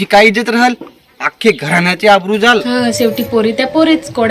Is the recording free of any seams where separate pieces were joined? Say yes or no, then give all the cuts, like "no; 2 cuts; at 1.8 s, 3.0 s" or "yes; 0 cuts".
no; 1 cut; at 2.7 s